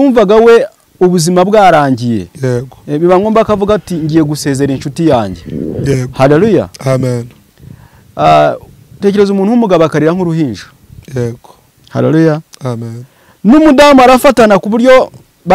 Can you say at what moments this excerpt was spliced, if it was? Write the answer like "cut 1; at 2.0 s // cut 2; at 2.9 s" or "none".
none